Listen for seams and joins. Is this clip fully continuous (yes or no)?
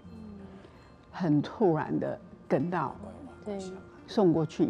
no